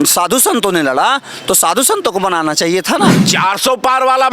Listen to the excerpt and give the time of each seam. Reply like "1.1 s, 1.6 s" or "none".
3.2 s